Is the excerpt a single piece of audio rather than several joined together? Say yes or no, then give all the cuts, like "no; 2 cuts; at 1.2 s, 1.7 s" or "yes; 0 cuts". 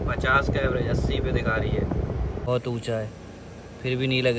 no; 1 cut; at 2.4 s